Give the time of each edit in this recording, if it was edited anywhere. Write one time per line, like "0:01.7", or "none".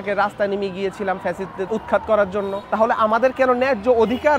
0:01.7
0:02.6